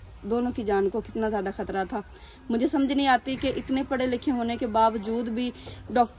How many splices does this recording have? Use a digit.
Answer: 0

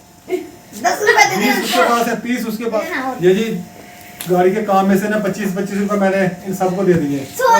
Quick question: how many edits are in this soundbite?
1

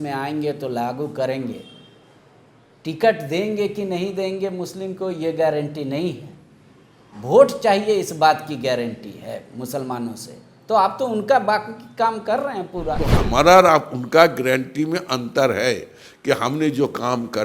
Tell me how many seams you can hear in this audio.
1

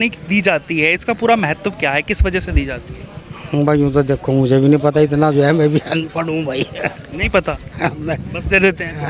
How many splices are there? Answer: 0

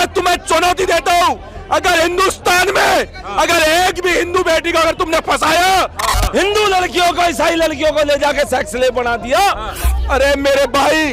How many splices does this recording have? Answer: 2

